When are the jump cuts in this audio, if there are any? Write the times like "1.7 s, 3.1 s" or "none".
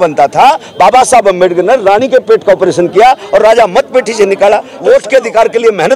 4.7 s